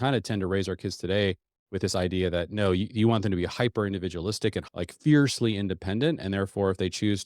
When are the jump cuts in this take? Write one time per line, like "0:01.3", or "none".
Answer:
0:04.6